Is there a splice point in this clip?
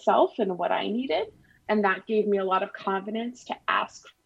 yes; 1 cut; at 1.6 s

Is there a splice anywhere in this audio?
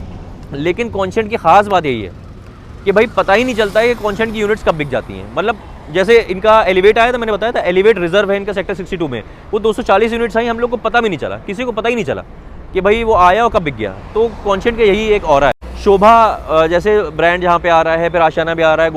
yes; 1 cut; at 15.7 s

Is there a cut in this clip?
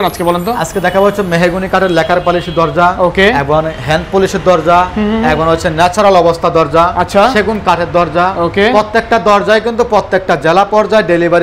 no; 0 cuts

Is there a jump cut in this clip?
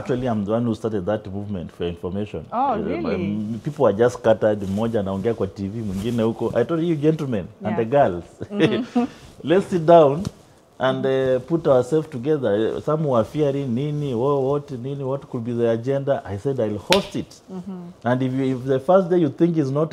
no; 0 cuts

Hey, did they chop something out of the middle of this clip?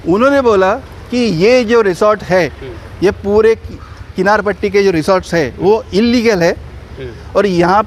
no; 0 cuts

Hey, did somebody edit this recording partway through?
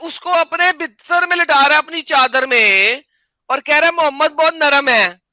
no; 0 cuts

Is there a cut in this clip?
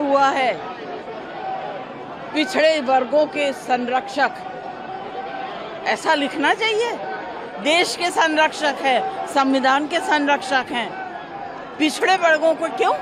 no; 0 cuts

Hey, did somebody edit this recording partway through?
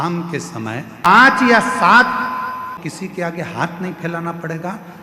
yes; 2 cuts; at 1.1 s, 2.8 s

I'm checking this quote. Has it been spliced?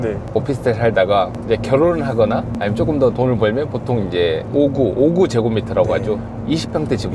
no; 0 cuts

